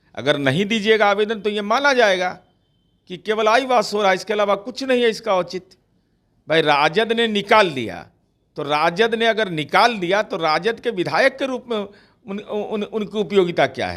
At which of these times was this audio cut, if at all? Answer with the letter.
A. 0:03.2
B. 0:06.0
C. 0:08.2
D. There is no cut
D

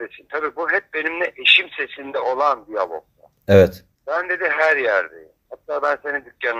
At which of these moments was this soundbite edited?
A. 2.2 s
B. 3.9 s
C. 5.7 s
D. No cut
B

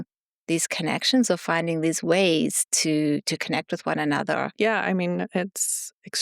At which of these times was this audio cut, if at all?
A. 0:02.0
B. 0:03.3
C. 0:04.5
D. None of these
C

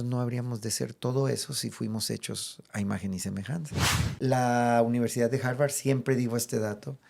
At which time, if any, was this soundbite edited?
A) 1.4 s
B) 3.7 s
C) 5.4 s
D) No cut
B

